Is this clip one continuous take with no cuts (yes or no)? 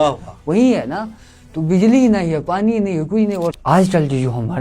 no